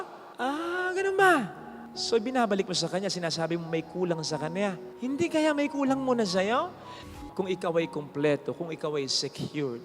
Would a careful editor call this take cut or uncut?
cut